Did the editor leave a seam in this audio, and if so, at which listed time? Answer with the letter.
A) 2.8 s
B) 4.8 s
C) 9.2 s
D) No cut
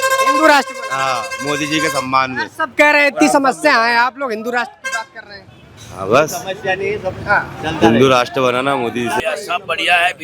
C